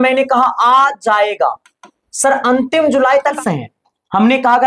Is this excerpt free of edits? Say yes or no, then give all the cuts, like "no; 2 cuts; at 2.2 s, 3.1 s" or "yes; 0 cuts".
no; 1 cut; at 3.4 s